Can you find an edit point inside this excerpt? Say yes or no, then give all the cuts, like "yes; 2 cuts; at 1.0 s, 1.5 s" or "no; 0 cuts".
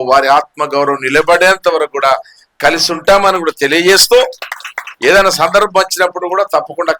no; 0 cuts